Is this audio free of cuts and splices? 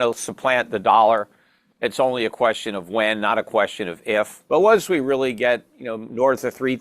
no; 1 cut; at 4.4 s

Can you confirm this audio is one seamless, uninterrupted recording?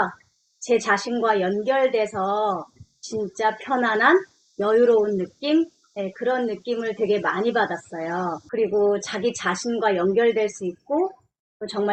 yes; 0 cuts

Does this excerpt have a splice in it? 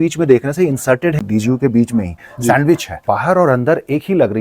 yes; 2 cuts; at 1.2 s, 2.9 s

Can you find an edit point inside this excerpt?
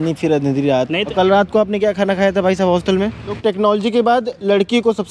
yes; 2 cuts; at 1.1 s, 3.4 s

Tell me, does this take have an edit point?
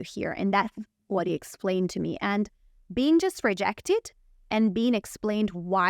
no; 0 cuts

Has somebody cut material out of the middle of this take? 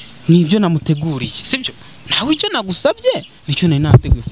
no; 0 cuts

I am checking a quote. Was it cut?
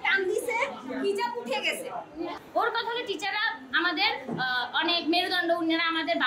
yes; 1 cut; at 2.4 s

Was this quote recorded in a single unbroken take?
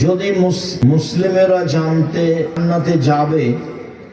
no; 2 cuts; at 1.1 s, 2.5 s

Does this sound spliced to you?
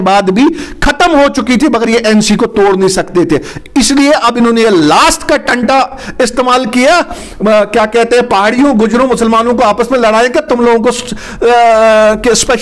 no; 0 cuts

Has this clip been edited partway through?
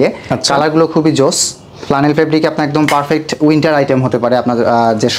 no; 0 cuts

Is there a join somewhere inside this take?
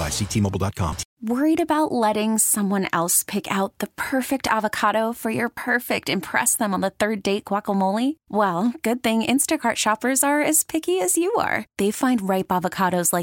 yes; 1 cut; at 1.1 s

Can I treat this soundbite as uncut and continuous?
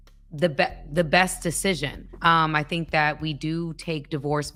yes; 0 cuts

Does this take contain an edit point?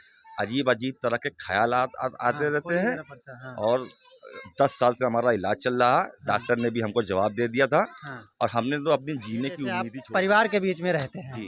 yes; 1 cut; at 9.9 s

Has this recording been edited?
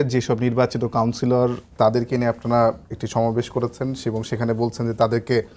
no; 0 cuts

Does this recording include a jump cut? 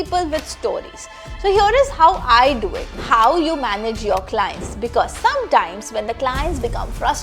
yes; 1 cut; at 3.0 s

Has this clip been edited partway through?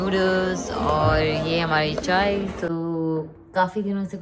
yes; 1 cut; at 2.7 s

